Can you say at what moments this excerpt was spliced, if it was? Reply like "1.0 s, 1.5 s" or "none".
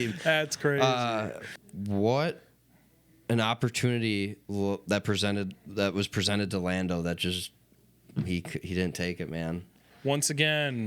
1.4 s, 9.9 s